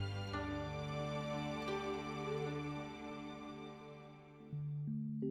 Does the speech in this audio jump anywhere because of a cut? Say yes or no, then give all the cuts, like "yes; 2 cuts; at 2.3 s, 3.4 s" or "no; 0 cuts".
no; 0 cuts